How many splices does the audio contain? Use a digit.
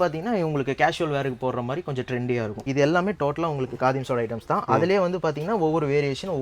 1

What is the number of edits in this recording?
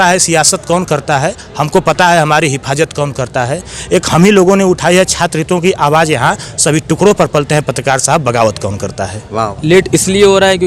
1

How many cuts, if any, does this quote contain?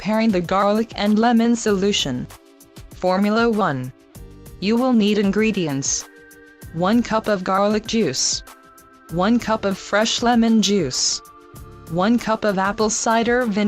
1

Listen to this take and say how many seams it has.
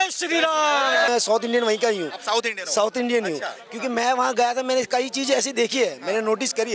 1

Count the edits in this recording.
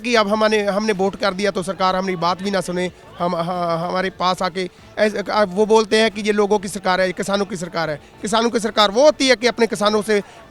0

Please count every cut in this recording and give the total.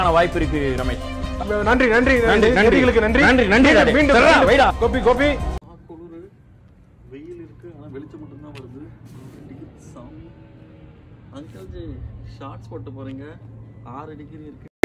1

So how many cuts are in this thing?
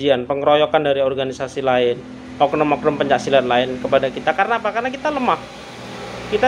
0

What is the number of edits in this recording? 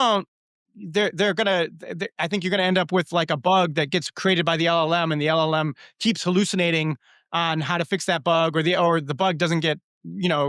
0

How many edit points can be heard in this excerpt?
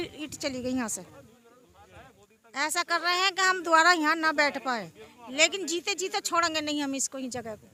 0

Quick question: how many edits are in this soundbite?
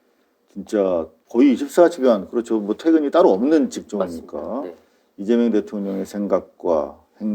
1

